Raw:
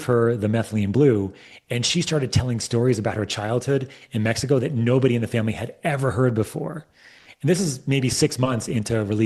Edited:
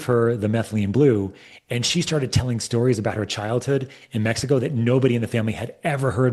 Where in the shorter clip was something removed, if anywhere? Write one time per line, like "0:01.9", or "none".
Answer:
none